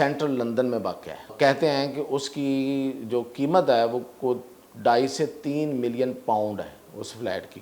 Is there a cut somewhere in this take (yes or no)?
yes